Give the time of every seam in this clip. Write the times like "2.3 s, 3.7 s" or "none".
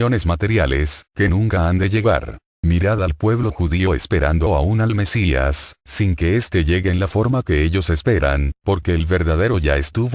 7.3 s